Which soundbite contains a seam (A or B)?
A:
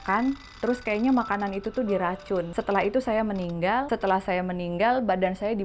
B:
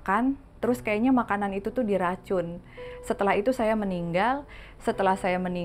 A